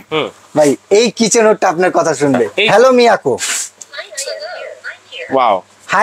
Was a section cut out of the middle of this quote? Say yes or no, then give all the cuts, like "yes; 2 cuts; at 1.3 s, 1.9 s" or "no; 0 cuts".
yes; 1 cut; at 2.6 s